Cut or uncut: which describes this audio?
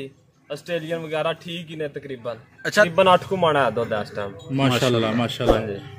cut